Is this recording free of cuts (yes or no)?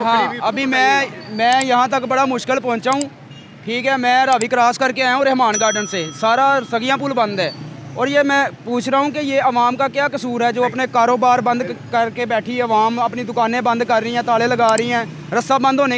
yes